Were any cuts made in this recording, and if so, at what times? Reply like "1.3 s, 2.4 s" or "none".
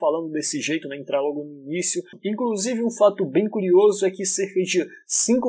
2.1 s